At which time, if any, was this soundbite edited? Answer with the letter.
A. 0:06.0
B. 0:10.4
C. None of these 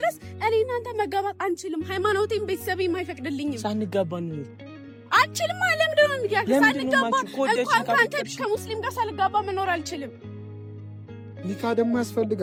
C